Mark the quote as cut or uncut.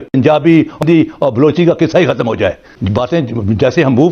cut